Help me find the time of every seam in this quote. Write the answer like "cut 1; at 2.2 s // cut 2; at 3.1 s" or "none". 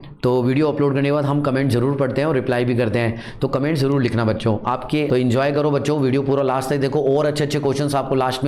cut 1; at 5.1 s